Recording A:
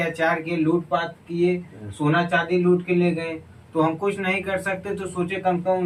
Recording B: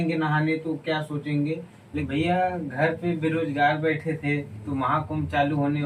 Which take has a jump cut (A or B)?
B